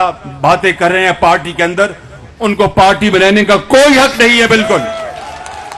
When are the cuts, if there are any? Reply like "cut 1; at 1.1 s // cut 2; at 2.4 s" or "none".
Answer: none